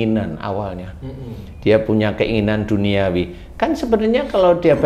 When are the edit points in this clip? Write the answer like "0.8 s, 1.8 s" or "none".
none